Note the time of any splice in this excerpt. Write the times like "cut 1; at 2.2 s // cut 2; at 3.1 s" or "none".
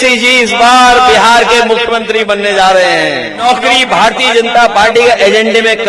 cut 1; at 3.4 s